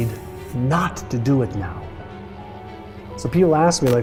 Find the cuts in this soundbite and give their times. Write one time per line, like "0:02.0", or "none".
none